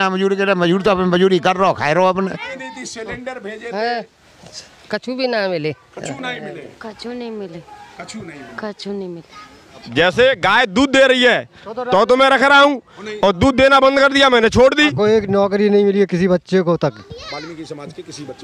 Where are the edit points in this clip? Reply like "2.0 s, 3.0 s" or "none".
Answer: 2.5 s, 9.9 s, 14.9 s